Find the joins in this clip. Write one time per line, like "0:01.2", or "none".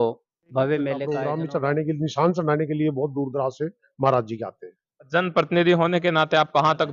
0:01.1